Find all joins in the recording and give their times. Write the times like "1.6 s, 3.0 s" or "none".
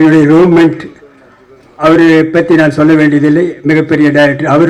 none